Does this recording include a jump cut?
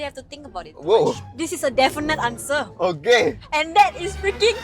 yes; 1 cut; at 3.4 s

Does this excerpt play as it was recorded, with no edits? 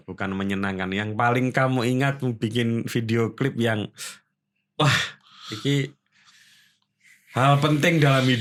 yes; 0 cuts

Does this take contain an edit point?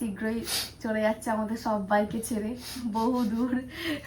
no; 0 cuts

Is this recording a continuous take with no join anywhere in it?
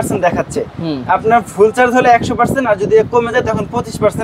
yes; 0 cuts

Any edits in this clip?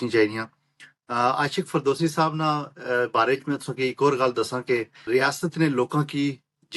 yes; 1 cut; at 4.9 s

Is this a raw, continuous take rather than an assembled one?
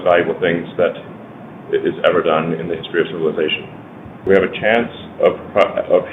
no; 1 cut; at 4.2 s

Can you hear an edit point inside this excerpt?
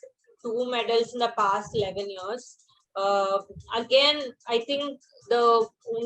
no; 0 cuts

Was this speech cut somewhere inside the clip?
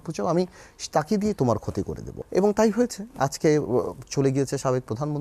yes; 1 cut; at 2.0 s

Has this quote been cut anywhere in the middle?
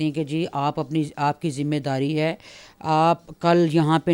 no; 0 cuts

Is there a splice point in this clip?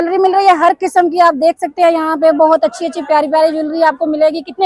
no; 0 cuts

